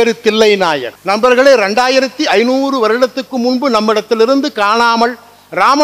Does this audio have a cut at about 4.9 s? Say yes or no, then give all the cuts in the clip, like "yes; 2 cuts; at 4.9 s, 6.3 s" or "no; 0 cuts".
no; 1 cut; at 0.9 s